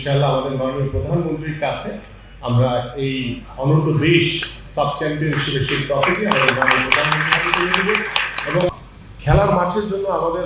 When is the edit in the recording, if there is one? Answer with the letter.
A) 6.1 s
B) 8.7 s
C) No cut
B